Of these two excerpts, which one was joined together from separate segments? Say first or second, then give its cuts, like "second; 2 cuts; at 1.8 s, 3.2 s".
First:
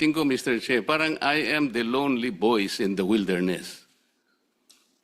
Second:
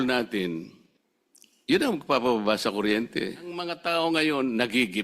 second; 1 cut; at 3.8 s